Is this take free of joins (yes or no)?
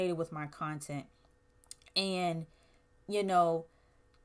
yes